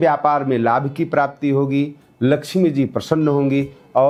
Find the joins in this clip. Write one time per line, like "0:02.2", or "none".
none

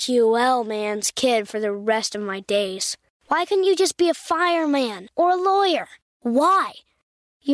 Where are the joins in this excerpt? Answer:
none

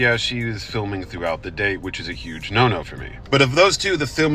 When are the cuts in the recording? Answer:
0:02.8

